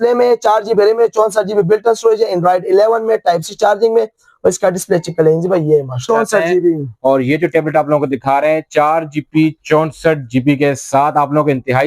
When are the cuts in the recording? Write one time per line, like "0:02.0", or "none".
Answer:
0:06.0